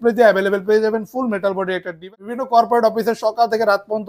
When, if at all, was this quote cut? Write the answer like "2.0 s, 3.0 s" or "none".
2.0 s